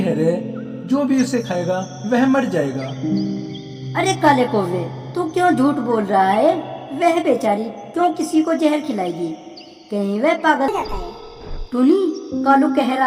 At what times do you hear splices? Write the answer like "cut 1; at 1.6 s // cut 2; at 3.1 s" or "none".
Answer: cut 1; at 10.7 s